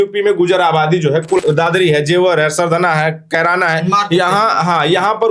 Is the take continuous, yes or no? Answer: no